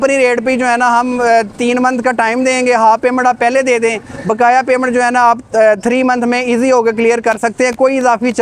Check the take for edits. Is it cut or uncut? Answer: uncut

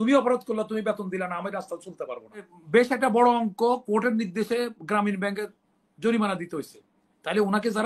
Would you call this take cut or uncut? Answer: cut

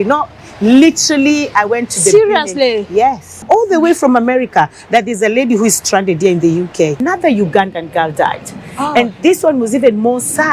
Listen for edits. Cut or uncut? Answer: cut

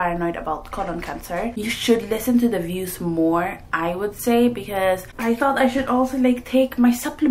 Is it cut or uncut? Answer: cut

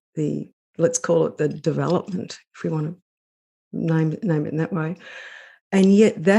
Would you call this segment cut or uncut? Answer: uncut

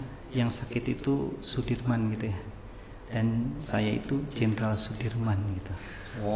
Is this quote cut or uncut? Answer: uncut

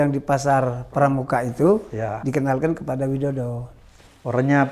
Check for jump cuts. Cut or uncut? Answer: uncut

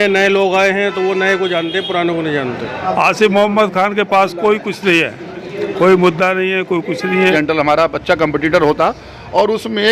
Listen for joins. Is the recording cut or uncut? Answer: cut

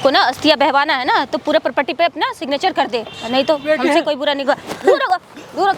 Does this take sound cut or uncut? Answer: cut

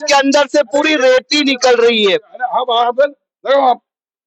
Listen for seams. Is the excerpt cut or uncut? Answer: uncut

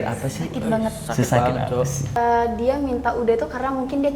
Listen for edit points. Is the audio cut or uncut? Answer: cut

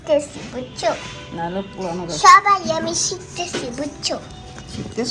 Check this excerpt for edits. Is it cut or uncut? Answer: uncut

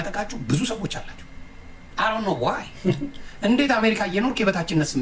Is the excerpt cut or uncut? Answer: uncut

